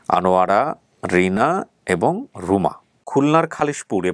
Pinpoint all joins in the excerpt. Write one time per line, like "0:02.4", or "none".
0:03.0